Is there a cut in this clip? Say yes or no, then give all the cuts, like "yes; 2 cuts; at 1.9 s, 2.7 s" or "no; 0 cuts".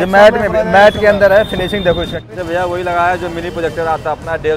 yes; 1 cut; at 2.3 s